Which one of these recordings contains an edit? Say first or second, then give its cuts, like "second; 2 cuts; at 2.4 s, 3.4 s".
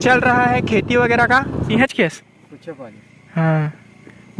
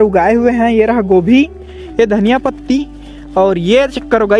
first; 1 cut; at 1.7 s